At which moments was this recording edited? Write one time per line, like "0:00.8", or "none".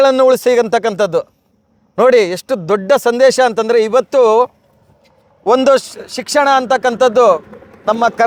none

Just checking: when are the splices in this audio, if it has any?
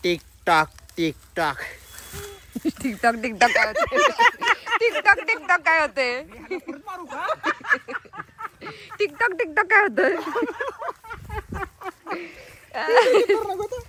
none

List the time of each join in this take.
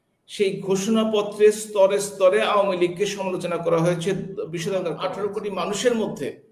0:05.1

